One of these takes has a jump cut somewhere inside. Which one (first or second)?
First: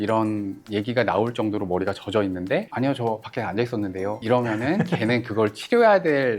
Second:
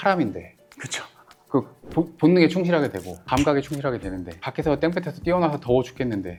first